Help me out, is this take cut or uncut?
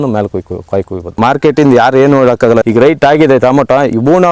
cut